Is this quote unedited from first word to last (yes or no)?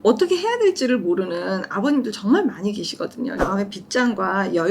no